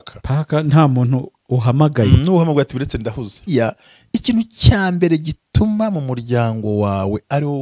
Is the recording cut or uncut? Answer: cut